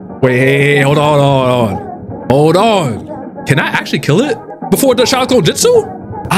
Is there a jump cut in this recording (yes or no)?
yes